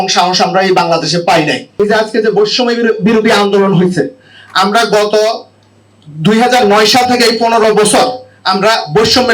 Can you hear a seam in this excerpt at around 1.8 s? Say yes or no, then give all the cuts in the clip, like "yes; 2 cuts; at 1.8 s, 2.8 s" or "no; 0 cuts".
yes; 1 cut; at 1.8 s